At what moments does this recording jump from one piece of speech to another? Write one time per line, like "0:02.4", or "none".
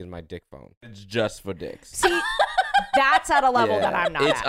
0:01.0